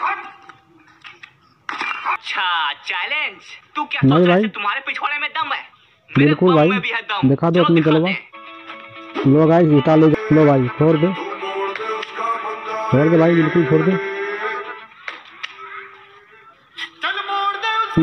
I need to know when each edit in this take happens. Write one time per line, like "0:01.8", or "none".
0:02.2
0:10.1

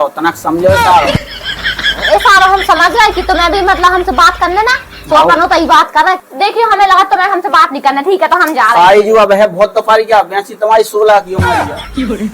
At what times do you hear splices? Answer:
0:06.2
0:11.4

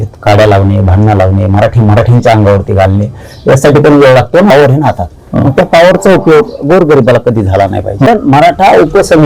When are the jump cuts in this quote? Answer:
0:04.5
0:08.1

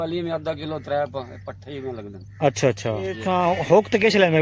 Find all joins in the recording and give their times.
0:03.2

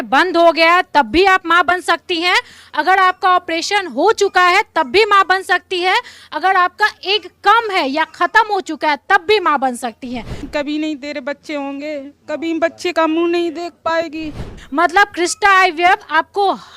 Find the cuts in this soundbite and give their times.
0:10.5
0:14.5

